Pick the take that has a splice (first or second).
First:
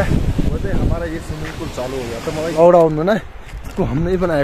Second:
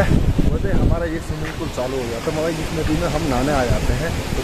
first